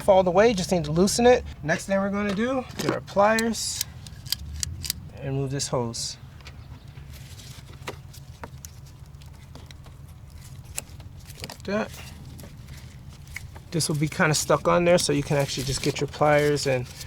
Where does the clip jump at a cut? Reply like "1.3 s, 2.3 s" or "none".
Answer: 1.5 s, 2.7 s, 5.1 s